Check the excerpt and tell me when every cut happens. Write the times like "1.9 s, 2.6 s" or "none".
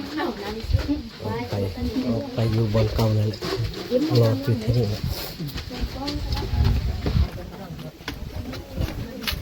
none